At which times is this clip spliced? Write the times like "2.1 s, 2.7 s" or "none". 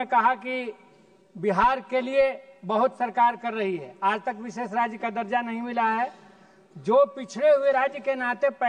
none